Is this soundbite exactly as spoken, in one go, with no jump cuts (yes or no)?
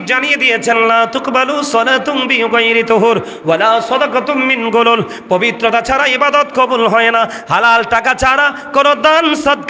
yes